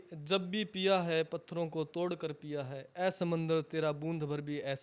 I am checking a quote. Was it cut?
no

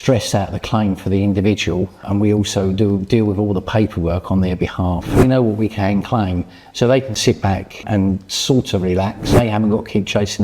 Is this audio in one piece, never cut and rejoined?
no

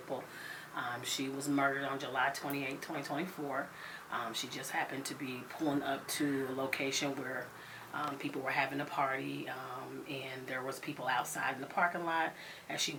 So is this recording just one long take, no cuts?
yes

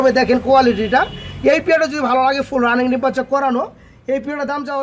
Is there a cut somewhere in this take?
no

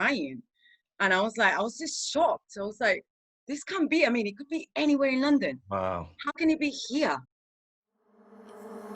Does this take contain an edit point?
yes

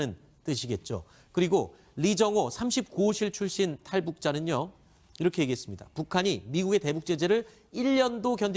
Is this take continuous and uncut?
yes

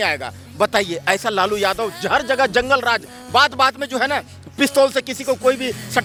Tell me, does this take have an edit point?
no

